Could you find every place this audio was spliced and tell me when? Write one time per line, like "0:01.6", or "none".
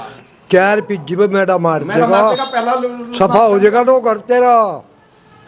none